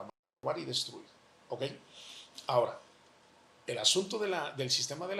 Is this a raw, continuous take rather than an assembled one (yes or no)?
yes